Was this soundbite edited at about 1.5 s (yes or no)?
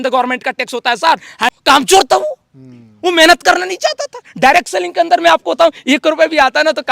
yes